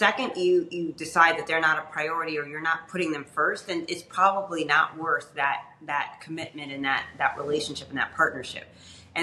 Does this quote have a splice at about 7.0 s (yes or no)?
no